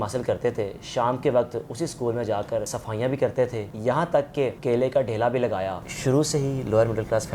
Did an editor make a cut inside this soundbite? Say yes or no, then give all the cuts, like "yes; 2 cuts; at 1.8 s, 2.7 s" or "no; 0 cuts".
yes; 3 cuts; at 2.8 s, 3.7 s, 5.9 s